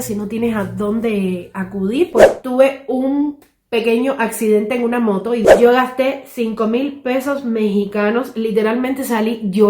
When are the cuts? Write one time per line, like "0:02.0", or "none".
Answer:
0:02.1
0:05.4